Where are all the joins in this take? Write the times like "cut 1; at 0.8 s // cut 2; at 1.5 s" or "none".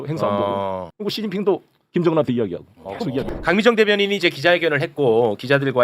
cut 1; at 3.2 s